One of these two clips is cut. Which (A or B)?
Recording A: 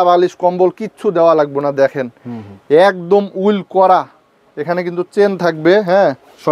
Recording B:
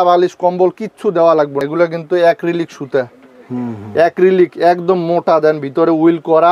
B